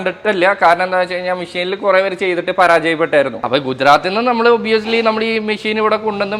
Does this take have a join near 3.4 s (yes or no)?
yes